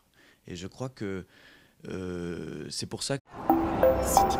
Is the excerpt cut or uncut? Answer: uncut